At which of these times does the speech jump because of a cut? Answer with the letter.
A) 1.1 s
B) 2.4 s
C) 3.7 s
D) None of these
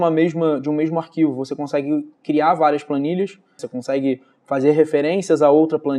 C